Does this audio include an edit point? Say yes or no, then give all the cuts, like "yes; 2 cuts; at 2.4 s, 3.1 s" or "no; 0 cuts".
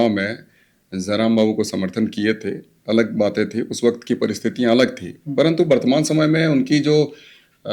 no; 0 cuts